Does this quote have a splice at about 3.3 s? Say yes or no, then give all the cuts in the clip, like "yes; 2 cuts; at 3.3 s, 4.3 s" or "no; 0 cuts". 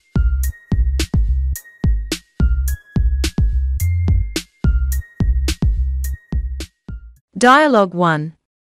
no; 0 cuts